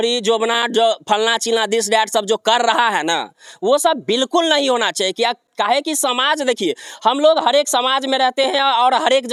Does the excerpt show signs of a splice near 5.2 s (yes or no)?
no